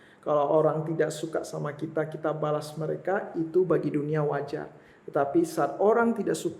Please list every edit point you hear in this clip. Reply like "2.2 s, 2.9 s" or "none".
none